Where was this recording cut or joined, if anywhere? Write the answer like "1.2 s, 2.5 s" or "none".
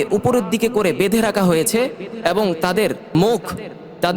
3.0 s